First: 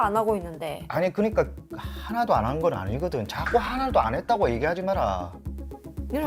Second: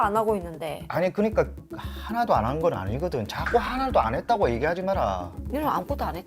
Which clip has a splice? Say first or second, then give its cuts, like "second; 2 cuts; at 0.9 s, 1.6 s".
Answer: second; 1 cut; at 5.3 s